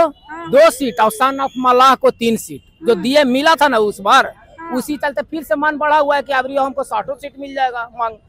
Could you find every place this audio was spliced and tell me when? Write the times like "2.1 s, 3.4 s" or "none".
none